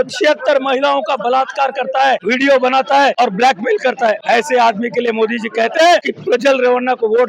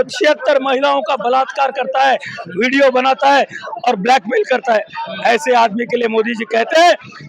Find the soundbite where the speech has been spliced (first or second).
first